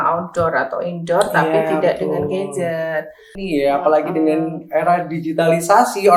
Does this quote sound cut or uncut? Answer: cut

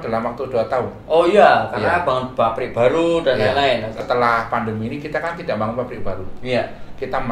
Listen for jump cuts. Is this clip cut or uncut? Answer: cut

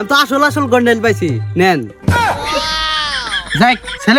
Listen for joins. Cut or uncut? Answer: uncut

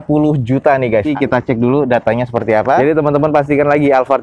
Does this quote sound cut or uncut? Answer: cut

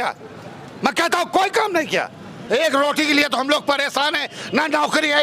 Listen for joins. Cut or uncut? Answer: cut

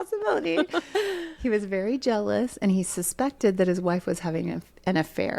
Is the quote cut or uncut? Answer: uncut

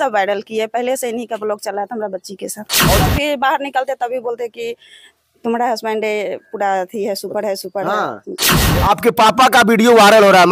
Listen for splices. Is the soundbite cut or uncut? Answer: cut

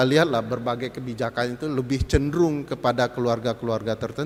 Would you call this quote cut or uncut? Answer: uncut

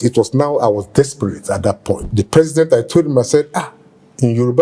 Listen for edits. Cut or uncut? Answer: cut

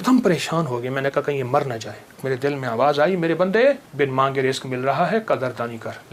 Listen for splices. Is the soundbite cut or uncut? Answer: cut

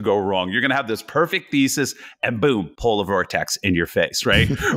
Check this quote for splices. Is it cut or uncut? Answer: uncut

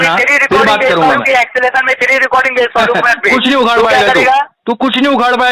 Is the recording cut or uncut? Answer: uncut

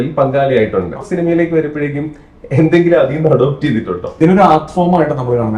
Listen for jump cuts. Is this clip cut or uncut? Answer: cut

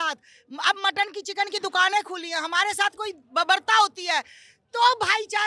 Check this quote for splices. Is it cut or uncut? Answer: uncut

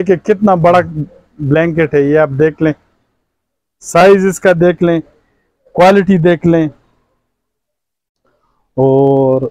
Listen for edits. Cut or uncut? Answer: uncut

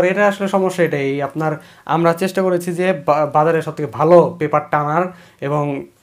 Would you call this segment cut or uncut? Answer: uncut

